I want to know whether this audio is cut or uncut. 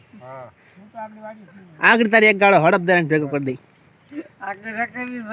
uncut